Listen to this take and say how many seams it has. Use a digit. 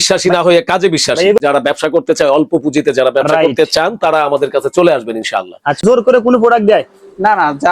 2